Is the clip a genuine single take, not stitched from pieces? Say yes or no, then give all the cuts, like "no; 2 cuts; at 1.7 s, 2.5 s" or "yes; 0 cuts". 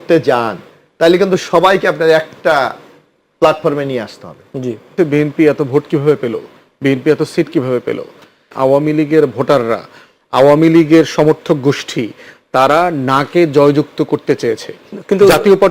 no; 2 cuts; at 4.9 s, 8.5 s